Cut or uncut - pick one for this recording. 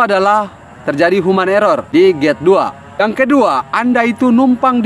cut